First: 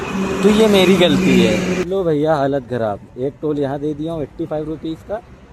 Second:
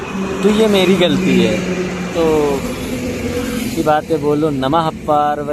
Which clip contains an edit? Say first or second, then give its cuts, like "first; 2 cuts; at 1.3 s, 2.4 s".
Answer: first; 1 cut; at 1.8 s